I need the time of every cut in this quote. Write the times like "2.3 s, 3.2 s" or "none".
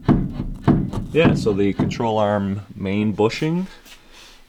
none